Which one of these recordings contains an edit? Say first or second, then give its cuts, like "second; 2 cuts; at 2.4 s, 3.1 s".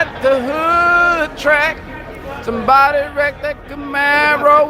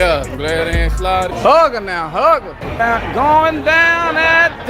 second; 2 cuts; at 1.3 s, 2.6 s